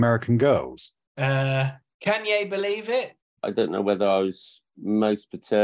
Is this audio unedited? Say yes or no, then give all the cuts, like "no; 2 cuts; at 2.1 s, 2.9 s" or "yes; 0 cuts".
no; 2 cuts; at 1.8 s, 3.3 s